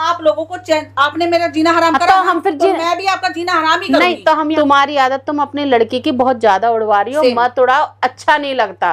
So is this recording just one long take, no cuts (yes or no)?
no